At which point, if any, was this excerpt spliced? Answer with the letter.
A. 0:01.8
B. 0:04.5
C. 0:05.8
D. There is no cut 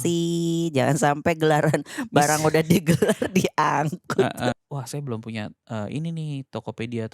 B